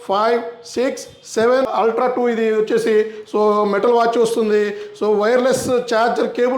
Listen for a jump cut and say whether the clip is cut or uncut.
cut